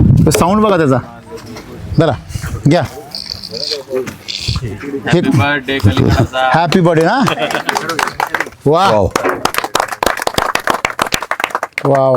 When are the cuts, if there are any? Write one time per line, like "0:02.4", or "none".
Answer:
0:08.4